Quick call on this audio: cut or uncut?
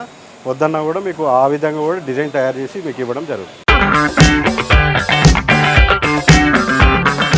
uncut